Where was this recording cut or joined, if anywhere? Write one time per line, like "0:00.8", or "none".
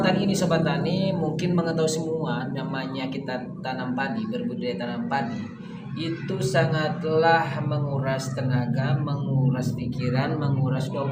none